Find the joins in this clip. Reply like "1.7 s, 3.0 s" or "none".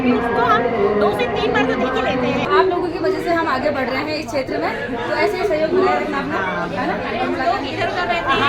2.5 s

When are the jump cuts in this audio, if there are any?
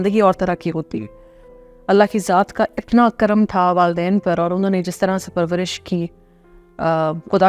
1.5 s

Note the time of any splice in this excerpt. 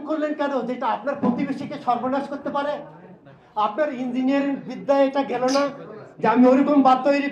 none

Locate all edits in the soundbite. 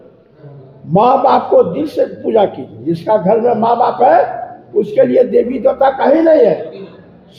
none

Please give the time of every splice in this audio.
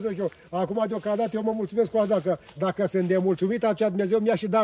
none

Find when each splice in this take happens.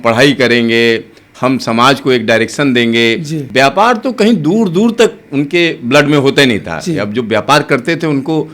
3.4 s

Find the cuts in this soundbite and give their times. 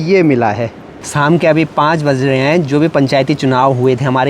1.1 s

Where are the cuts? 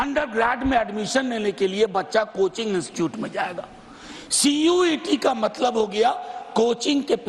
none

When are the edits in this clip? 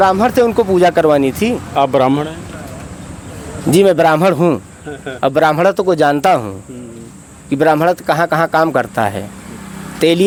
none

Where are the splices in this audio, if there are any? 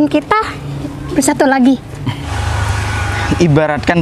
2.3 s

